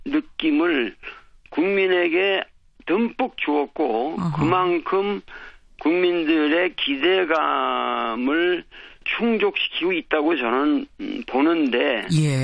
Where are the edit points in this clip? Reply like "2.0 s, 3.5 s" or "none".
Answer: 8.2 s